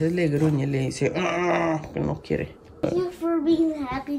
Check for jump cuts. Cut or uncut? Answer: cut